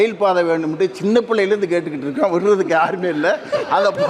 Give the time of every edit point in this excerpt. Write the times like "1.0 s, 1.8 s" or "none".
none